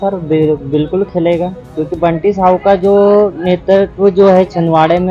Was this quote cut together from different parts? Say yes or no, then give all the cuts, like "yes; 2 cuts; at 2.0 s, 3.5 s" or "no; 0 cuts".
no; 0 cuts